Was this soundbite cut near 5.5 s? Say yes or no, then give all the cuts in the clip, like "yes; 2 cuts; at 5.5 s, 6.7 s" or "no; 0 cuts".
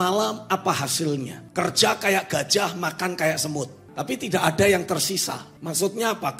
yes; 3 cuts; at 1.4 s, 3.8 s, 5.5 s